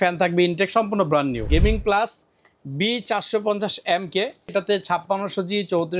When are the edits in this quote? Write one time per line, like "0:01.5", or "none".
0:01.5
0:04.5